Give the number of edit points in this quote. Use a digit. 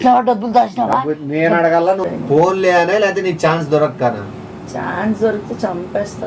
2